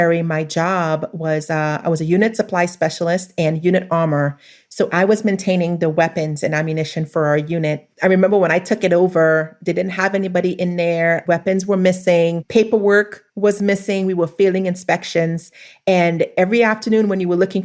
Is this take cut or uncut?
uncut